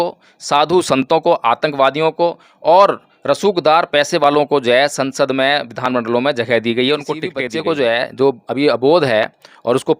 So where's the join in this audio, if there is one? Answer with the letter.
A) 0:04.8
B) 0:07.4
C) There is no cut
B